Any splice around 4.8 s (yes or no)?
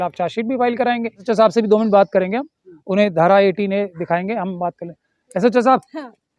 no